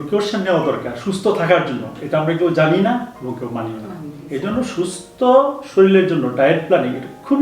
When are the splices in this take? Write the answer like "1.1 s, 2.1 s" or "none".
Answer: none